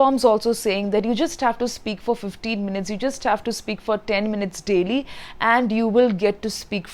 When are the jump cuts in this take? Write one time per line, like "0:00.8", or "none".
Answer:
none